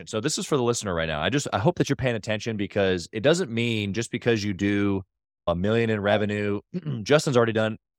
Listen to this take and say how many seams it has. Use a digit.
0